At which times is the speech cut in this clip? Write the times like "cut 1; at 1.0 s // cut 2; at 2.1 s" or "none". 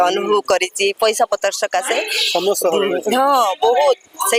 none